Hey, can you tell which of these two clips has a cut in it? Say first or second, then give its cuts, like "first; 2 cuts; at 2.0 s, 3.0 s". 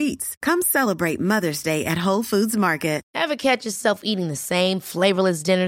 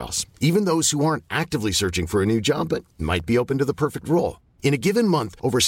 first; 1 cut; at 3.0 s